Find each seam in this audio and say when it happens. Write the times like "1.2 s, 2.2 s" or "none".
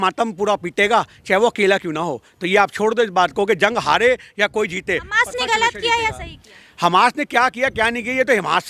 none